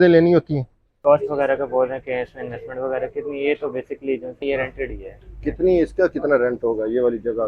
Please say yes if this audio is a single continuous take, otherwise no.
no